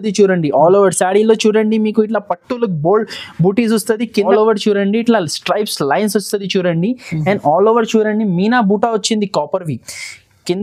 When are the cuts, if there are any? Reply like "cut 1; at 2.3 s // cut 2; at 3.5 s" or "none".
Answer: cut 1; at 4.2 s